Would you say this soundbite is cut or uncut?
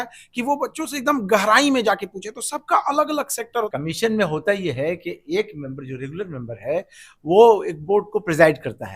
cut